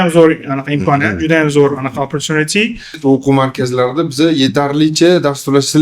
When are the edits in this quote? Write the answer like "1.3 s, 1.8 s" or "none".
3.0 s